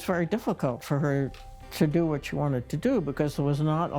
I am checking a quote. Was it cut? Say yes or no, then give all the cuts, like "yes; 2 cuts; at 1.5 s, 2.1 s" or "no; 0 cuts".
no; 0 cuts